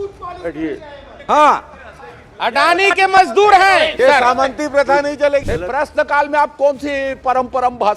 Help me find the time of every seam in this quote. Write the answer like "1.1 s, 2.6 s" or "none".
5.5 s

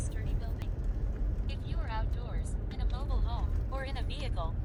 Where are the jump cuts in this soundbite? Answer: none

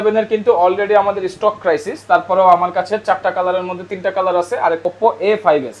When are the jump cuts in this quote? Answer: 4.8 s

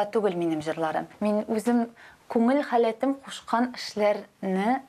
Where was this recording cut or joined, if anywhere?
1.1 s

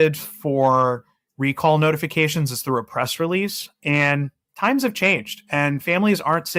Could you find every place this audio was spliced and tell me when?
none

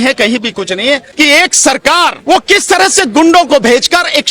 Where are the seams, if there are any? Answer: 1.1 s, 2.2 s

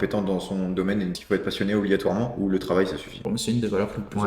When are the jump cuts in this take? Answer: 1.2 s, 3.1 s

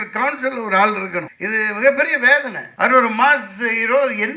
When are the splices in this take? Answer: 1.4 s, 2.6 s

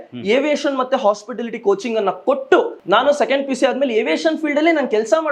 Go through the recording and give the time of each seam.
2.8 s

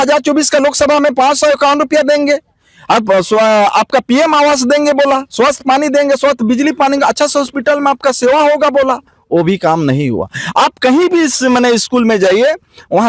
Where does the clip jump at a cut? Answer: none

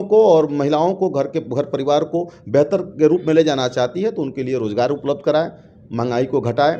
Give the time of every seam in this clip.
none

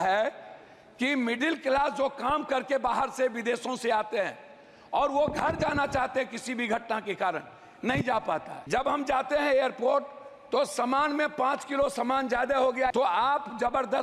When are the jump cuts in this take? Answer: 8.5 s, 12.9 s

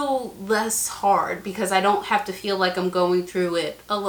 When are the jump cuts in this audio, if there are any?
none

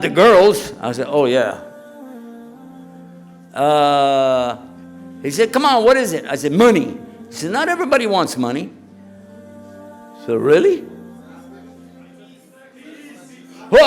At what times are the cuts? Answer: 2.0 s, 3.5 s

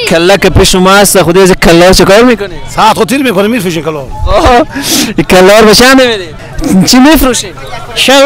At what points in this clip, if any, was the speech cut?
6.3 s

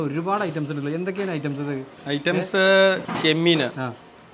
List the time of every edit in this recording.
3.0 s

